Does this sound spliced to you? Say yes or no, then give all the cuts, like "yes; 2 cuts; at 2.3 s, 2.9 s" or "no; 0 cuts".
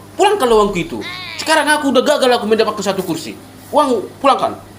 no; 0 cuts